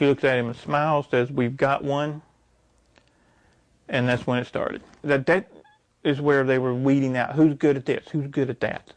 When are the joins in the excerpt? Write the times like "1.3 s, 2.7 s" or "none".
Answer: 5.0 s